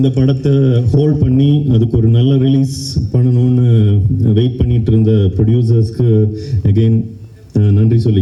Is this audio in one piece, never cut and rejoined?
yes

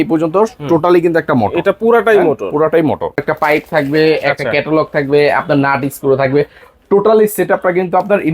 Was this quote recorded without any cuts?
no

